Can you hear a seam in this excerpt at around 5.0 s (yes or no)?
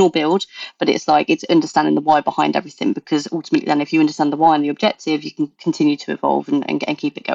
no